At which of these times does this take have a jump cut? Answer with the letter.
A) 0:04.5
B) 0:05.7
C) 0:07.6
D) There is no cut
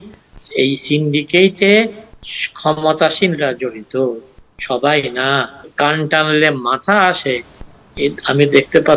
B